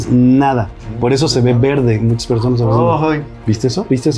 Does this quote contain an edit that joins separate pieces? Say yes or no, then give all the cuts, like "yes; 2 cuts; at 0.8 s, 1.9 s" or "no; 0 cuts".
no; 0 cuts